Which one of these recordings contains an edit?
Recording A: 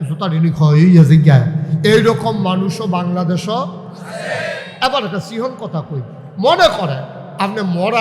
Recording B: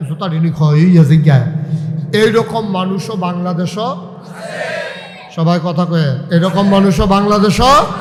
A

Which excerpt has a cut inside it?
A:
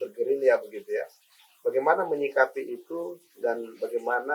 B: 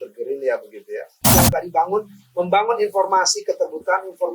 B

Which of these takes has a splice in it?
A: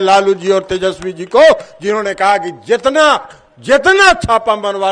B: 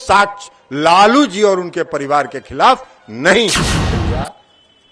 B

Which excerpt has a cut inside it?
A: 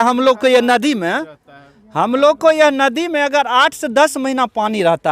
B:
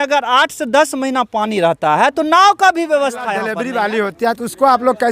B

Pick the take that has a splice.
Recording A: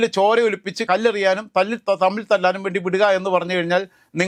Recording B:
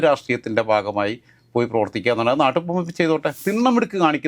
B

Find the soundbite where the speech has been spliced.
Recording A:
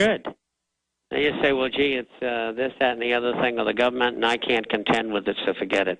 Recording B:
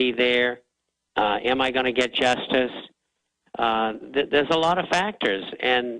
B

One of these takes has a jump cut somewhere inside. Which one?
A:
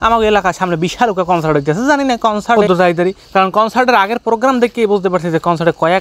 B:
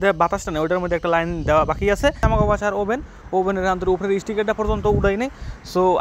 B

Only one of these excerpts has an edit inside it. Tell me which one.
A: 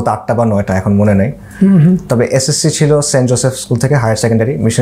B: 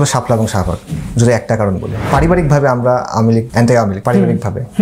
B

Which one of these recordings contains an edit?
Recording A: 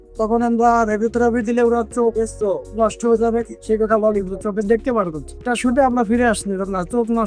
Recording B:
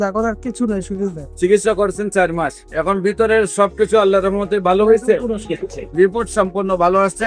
B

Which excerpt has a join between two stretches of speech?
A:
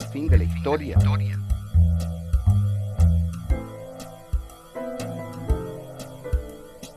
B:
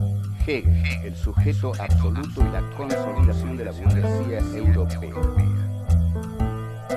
B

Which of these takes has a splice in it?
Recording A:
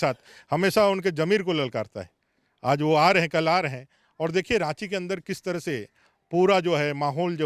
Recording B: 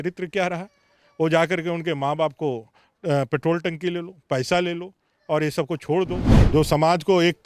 B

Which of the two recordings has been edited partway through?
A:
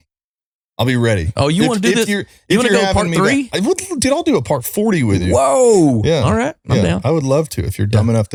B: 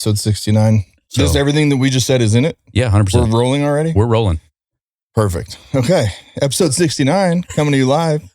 B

